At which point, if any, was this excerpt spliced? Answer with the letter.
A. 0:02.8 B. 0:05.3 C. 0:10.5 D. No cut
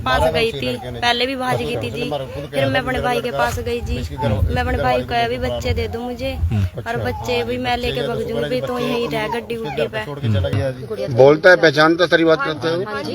C